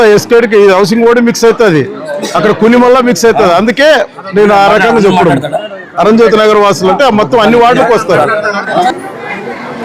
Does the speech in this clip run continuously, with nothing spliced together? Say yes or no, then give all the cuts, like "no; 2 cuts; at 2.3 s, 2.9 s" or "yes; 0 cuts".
no; 1 cut; at 8.9 s